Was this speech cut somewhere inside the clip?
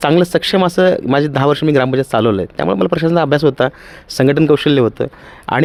no; 0 cuts

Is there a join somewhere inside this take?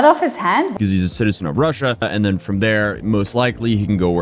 yes; 2 cuts; at 0.7 s, 2.0 s

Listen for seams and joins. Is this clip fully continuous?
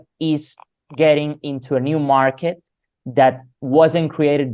yes; 0 cuts

